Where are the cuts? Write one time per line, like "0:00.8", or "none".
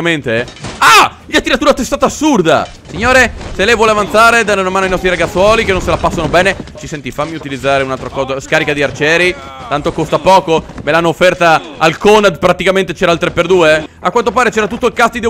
0:02.9
0:06.8
0:13.9